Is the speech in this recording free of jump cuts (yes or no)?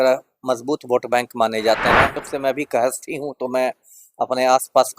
no